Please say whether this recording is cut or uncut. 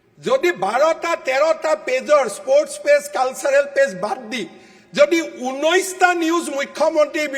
uncut